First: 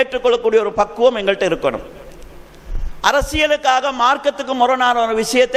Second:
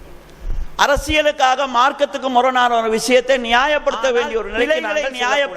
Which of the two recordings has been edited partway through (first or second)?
second